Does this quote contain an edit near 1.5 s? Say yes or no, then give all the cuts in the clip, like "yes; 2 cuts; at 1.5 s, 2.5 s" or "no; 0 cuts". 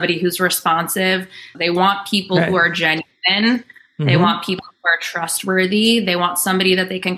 yes; 1 cut; at 1.5 s